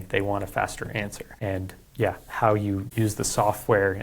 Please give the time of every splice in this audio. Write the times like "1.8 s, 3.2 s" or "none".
1.2 s, 2.9 s

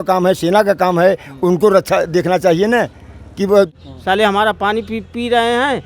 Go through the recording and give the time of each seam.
3.7 s

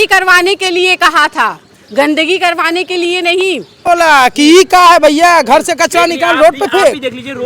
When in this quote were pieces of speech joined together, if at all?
3.7 s

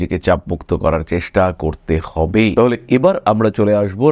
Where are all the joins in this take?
none

